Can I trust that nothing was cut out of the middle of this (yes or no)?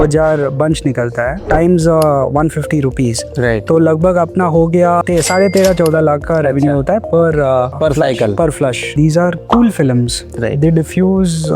no